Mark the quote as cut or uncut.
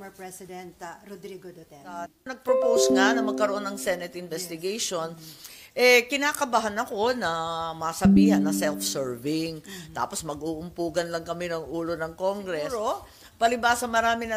cut